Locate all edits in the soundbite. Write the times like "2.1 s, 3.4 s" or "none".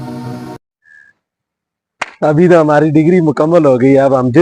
none